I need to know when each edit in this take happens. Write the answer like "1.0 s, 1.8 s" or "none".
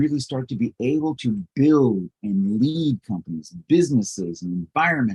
none